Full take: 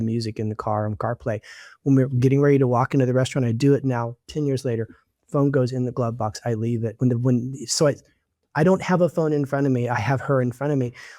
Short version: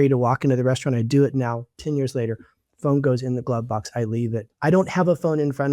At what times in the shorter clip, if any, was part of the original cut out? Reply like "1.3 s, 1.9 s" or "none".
4.4 s